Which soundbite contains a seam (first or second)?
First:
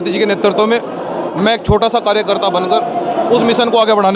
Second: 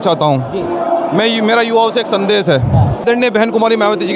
second